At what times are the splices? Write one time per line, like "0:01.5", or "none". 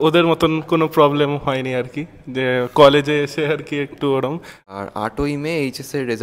0:04.5